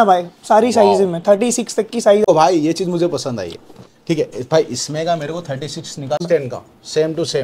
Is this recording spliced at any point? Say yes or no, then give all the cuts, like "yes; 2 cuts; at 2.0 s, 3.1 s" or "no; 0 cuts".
yes; 2 cuts; at 2.3 s, 6.2 s